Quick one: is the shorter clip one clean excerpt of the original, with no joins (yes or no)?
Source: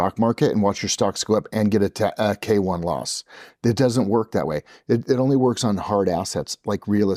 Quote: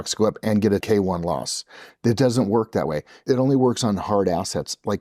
no